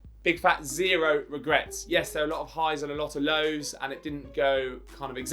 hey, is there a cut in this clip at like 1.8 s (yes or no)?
yes